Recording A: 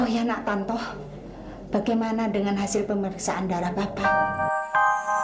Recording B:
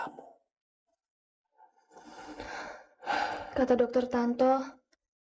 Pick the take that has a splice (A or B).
A